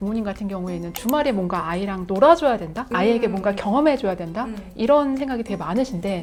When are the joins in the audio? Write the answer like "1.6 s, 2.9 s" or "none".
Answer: none